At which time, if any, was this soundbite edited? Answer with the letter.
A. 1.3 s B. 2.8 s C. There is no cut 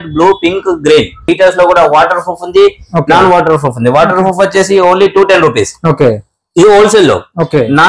A